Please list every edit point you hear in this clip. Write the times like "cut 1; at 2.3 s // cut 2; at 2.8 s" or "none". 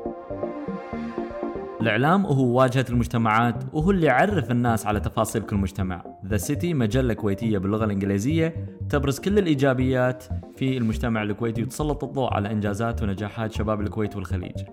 cut 1; at 1.8 s